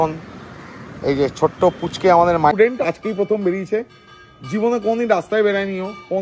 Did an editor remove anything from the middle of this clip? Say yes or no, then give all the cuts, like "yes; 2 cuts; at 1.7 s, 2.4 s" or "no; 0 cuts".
yes; 1 cut; at 2.5 s